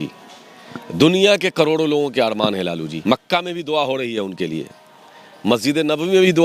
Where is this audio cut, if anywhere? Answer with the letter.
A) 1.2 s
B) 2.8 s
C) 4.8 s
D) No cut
B